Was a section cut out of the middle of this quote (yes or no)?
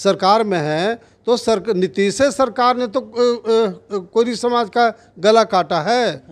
no